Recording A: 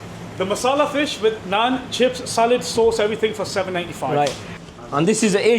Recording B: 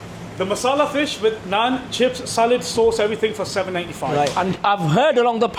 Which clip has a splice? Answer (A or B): A